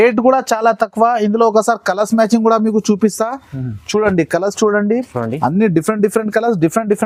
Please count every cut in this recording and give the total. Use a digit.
0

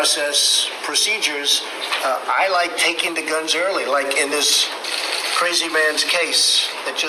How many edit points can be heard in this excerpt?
0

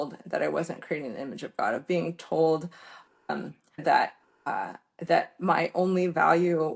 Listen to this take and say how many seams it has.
1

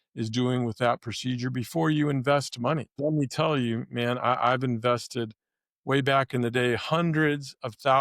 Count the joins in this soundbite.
1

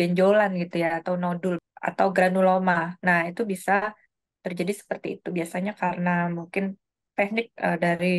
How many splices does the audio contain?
1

